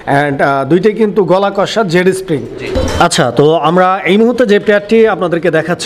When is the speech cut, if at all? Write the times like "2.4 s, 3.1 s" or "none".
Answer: 2.7 s